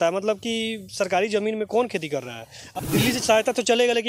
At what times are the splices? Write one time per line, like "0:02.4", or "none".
0:02.4